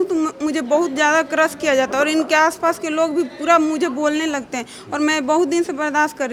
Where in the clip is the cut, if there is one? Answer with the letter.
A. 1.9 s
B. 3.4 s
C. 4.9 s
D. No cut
D